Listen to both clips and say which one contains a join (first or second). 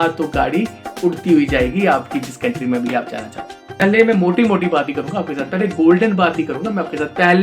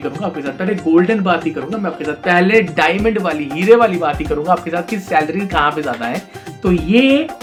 first